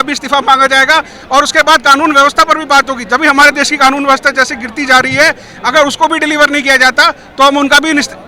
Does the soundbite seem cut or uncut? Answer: uncut